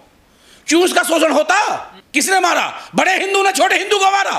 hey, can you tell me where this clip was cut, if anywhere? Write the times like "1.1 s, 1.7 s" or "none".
1.9 s